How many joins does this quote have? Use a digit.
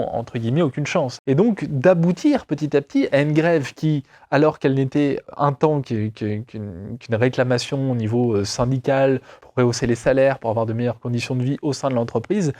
3